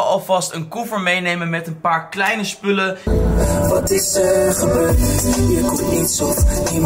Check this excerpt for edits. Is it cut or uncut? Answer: cut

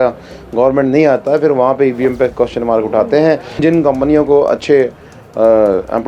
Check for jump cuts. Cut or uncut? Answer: cut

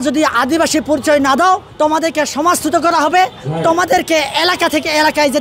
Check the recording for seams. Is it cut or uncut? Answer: cut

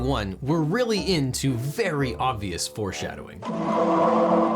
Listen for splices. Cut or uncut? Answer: cut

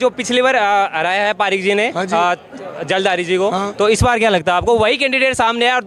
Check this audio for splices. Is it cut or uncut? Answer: uncut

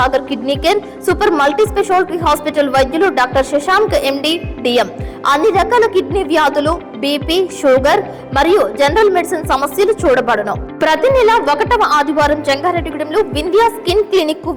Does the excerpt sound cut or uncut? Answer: uncut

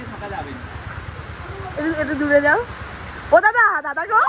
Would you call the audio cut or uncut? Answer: uncut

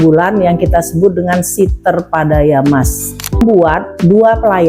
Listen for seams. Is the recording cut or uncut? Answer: cut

